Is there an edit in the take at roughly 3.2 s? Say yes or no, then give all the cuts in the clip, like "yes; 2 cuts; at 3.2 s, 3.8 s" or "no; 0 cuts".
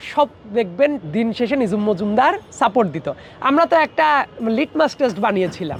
no; 0 cuts